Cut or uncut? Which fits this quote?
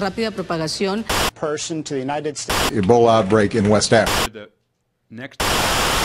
cut